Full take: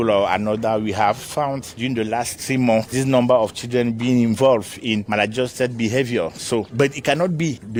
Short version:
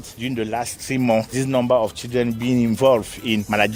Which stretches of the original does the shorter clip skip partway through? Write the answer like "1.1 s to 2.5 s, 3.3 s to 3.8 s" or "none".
none

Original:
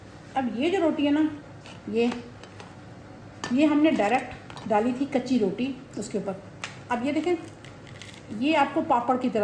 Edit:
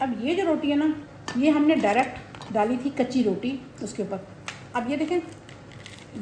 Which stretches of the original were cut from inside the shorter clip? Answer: 1.5 s to 3.3 s

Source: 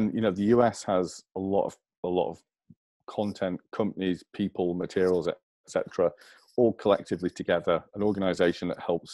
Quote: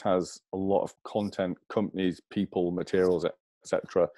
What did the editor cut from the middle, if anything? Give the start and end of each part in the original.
1.8 s to 3.0 s

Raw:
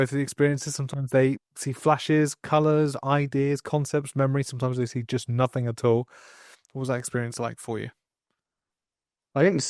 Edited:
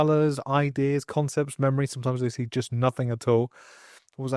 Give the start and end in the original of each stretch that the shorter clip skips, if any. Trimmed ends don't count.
none

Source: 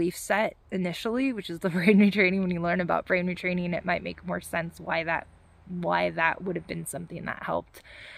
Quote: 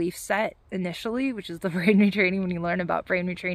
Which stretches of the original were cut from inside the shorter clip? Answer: none

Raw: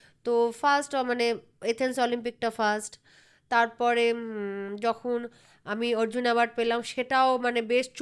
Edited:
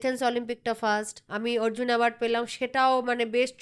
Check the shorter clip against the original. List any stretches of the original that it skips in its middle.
3.0 s to 5.6 s

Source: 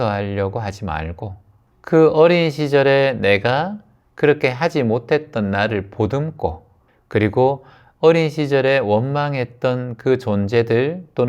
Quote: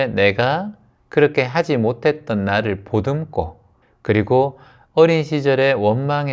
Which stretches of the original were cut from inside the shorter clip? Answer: none

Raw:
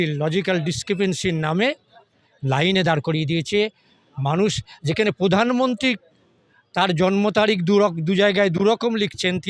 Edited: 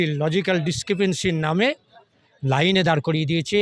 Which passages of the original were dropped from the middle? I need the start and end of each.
none

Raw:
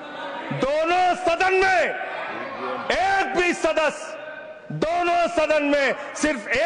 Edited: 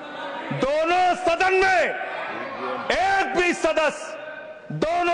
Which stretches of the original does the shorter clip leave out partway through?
none

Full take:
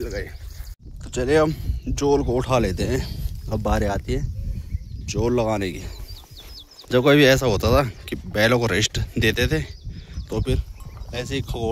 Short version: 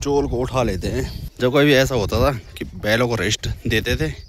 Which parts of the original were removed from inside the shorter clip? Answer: 3.2 s to 6.7 s

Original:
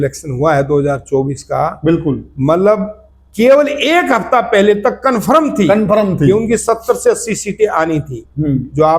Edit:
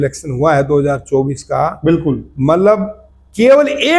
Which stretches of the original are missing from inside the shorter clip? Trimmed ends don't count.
none

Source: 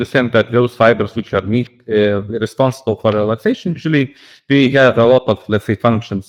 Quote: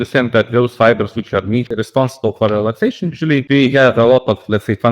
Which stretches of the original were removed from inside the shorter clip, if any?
1.7 s to 2.3 s, 4.1 s to 4.4 s

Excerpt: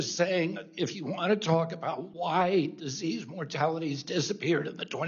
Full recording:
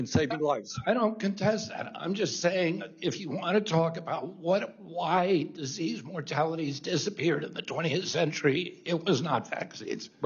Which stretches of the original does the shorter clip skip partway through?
4.3 s to 4.8 s

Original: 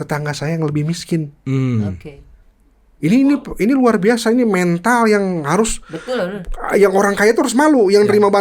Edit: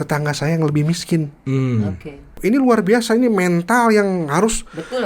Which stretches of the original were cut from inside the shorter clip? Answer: 2.3 s to 3.5 s

